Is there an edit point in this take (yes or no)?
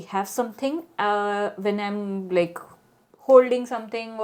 no